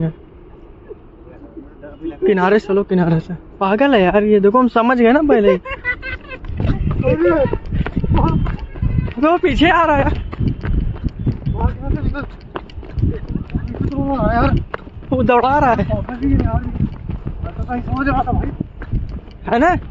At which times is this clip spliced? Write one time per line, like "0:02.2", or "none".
none